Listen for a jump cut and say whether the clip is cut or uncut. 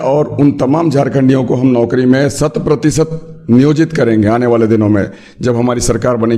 uncut